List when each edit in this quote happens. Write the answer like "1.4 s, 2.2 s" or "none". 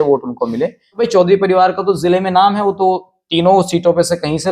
1.0 s